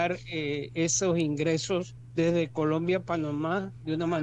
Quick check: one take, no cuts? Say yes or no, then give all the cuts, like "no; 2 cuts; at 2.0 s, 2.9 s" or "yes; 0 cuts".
no; 1 cut; at 2.0 s